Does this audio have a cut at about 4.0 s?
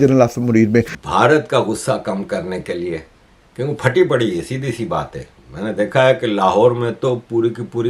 no; 1 cut; at 0.9 s

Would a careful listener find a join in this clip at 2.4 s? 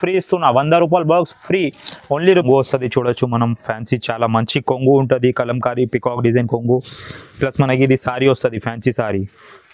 yes; 1 cut; at 2.4 s

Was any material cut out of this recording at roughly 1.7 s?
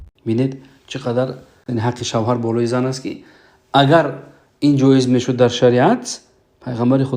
yes; 1 cut; at 1.7 s

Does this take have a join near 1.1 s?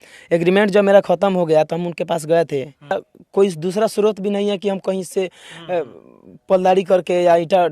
no; 1 cut; at 2.9 s

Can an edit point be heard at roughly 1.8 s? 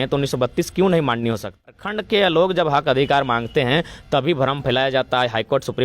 yes; 1 cut; at 1.8 s

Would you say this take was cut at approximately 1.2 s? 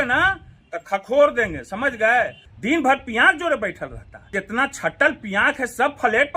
no; 2 cuts; at 2.5 s, 4.4 s

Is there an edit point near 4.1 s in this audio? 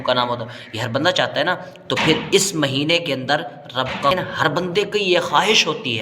yes; 1 cut; at 4.1 s

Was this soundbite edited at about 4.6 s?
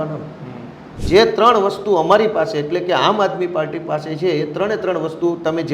no; 1 cut; at 0.9 s

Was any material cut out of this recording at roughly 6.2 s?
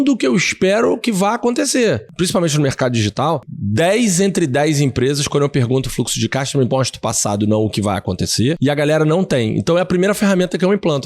no; 3 cuts; at 2.1 s, 3.6 s, 8.6 s

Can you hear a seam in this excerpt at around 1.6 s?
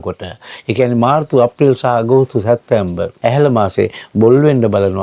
no; 1 cut; at 3.1 s

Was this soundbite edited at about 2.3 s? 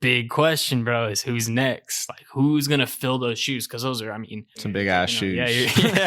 no; 1 cut; at 4.7 s

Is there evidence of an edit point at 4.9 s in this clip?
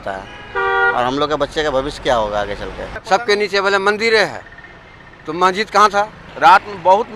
no; 2 cuts; at 2.9 s, 6.2 s

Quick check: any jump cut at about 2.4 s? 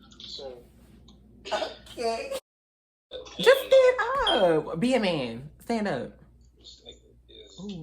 yes; 1 cut; at 2.4 s

